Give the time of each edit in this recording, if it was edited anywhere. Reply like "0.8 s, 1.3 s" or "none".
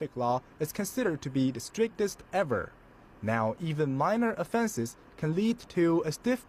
none